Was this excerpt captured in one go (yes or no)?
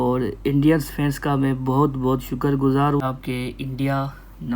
no